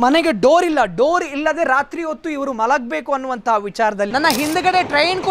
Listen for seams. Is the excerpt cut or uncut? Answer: cut